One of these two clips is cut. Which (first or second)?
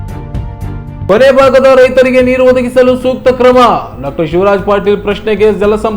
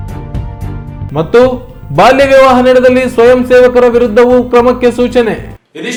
first